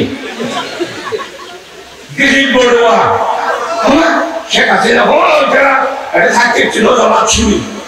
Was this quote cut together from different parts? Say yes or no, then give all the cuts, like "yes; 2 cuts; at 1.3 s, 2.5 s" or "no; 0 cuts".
no; 0 cuts